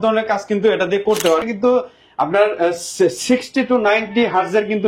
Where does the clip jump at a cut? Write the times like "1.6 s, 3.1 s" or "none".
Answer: 1.4 s